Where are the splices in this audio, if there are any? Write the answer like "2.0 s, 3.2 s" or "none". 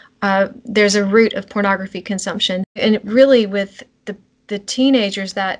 2.7 s